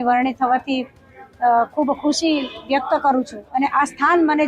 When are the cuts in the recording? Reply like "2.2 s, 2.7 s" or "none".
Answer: 3.4 s